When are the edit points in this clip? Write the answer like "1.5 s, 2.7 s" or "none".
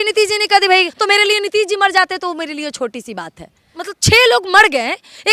0.9 s, 3.7 s